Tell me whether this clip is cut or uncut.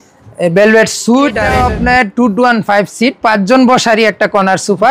cut